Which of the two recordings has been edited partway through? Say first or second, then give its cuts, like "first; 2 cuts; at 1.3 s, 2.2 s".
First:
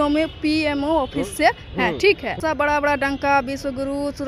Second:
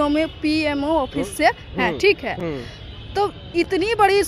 first; 1 cut; at 2.4 s